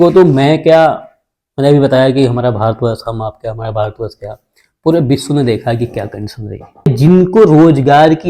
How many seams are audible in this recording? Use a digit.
1